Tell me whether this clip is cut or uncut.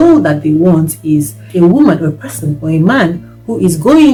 uncut